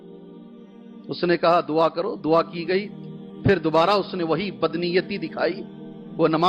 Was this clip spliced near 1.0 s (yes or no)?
yes